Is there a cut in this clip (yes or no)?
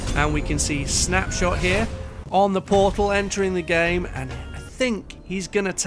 no